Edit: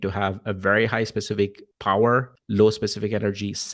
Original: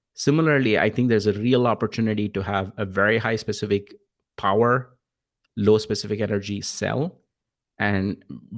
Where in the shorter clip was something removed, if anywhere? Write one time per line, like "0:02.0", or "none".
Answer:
0:01.7
0:02.4